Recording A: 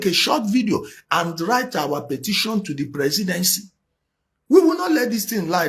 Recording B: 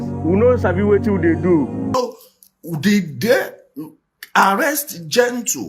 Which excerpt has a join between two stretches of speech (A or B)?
B